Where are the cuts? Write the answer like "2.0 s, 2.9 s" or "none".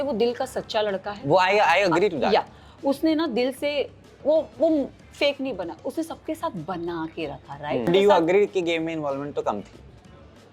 7.9 s